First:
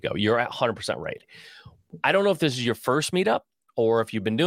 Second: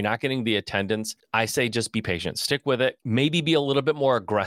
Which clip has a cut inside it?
second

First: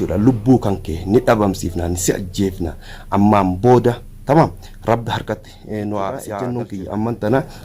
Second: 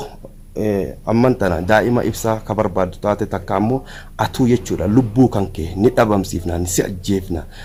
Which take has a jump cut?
first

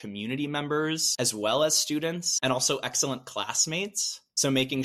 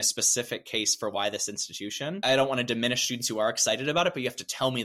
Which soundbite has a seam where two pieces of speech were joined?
first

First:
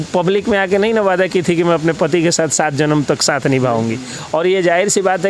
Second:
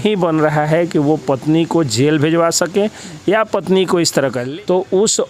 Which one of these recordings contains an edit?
second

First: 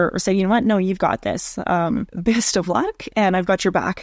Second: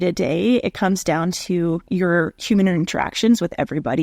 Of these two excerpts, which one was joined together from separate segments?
second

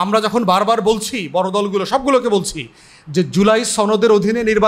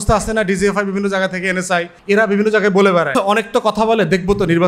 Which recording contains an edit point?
second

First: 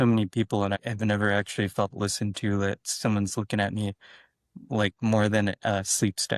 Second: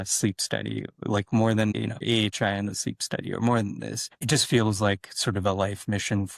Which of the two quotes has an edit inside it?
second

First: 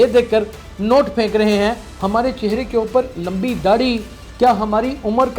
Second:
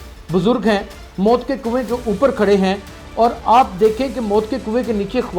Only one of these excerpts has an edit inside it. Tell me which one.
first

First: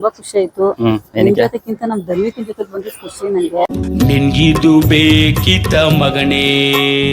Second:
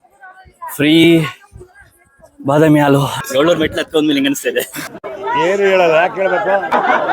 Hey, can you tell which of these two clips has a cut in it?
second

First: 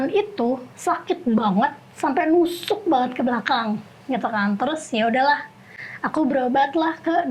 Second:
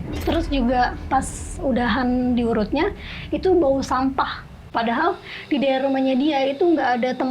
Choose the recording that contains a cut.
second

